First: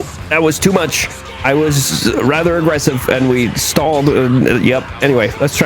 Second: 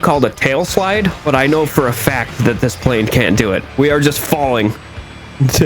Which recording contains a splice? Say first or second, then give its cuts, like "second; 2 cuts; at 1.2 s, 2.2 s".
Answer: second; 1 cut; at 3.6 s